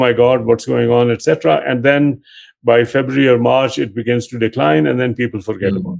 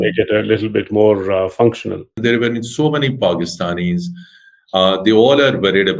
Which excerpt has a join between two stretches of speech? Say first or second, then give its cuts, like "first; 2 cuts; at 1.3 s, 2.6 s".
second; 1 cut; at 2.2 s